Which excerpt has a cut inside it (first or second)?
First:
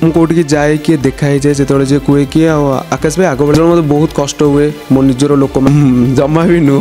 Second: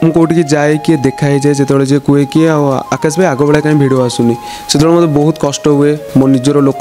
first